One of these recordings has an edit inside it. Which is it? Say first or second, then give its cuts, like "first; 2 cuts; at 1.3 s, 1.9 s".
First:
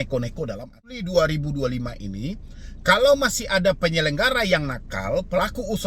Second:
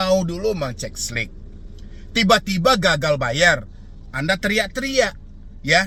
first; 1 cut; at 0.9 s